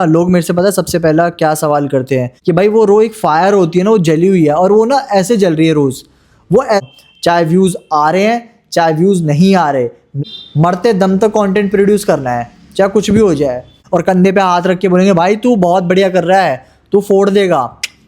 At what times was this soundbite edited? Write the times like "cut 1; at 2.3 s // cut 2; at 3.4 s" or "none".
cut 1; at 2.3 s // cut 2; at 6.8 s // cut 3; at 10.2 s // cut 4; at 13.8 s